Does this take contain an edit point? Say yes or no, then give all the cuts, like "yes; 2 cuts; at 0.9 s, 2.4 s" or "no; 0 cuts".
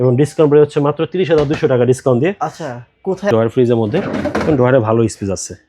yes; 1 cut; at 3.3 s